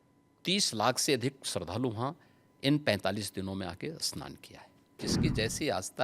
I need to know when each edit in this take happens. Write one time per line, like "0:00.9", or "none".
0:04.9